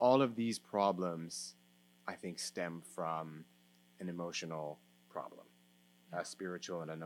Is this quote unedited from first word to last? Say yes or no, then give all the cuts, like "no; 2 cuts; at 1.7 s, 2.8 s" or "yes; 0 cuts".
yes; 0 cuts